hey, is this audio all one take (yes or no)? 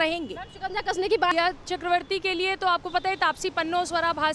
no